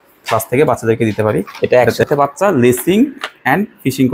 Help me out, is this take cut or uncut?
cut